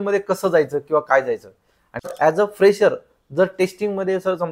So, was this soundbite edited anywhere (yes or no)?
yes